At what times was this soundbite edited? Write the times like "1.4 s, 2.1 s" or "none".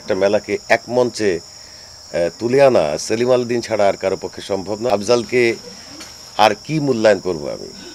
4.9 s